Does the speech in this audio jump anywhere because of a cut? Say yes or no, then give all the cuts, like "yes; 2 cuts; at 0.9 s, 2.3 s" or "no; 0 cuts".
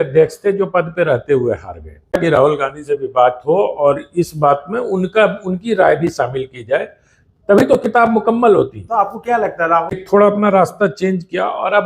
yes; 2 cuts; at 2.1 s, 10.0 s